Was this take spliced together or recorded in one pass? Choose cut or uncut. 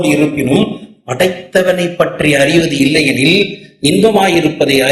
uncut